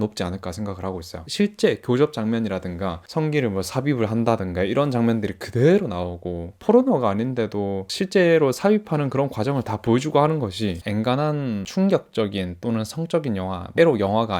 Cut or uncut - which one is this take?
cut